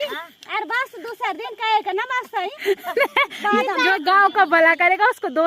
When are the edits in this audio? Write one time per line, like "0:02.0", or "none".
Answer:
0:03.8